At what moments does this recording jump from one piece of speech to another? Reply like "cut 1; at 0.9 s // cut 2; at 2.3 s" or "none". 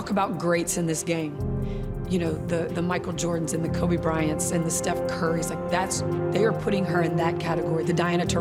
none